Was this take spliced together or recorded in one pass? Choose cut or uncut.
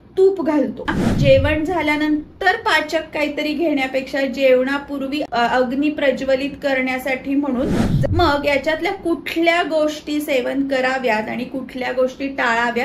cut